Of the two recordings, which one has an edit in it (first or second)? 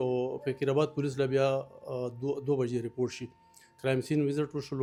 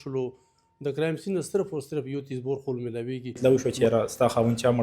second